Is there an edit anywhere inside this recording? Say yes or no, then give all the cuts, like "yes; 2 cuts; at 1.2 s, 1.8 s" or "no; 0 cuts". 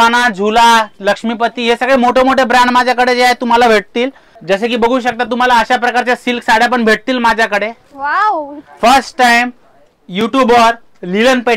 yes; 2 cuts; at 4.3 s, 8.6 s